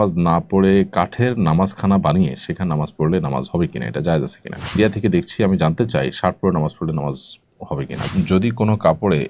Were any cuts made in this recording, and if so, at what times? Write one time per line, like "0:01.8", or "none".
0:04.8
0:08.1